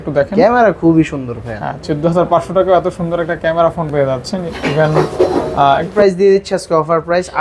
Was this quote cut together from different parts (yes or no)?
yes